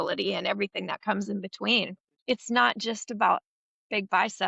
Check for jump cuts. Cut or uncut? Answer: cut